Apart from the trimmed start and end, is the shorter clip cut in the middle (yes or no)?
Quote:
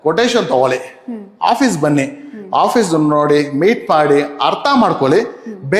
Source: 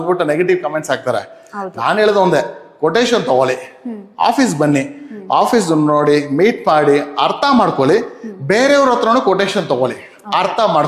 no